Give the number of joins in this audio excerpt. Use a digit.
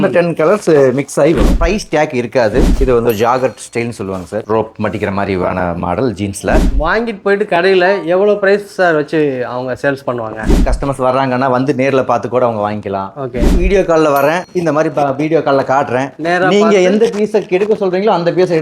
5